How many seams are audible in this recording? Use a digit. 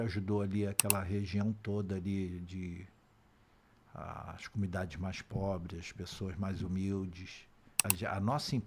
1